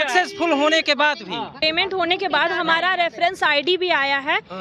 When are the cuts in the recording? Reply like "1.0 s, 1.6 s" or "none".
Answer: 1.6 s